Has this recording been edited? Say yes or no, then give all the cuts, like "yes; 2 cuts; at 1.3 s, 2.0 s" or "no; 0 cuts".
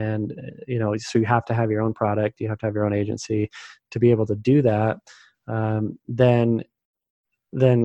no; 0 cuts